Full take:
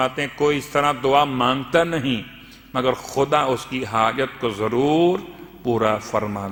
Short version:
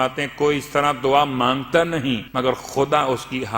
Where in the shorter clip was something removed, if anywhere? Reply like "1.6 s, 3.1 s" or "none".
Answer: 2.3 s